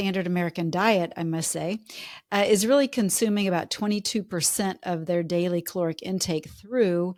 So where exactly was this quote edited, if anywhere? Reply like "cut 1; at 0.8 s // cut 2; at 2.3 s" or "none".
none